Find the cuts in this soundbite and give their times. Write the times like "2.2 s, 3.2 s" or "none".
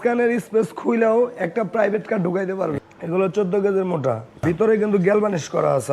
2.8 s, 4.4 s